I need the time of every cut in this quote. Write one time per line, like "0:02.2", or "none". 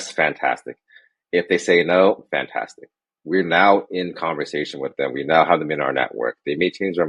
none